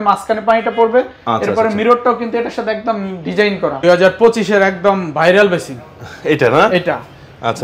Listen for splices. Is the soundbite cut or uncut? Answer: cut